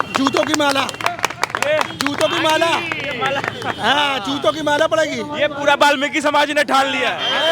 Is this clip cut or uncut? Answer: uncut